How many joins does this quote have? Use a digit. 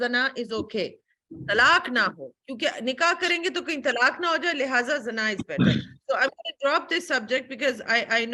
0